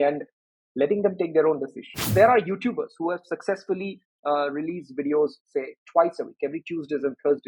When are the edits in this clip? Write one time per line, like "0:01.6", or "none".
0:02.1